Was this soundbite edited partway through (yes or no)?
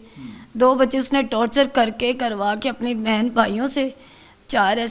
no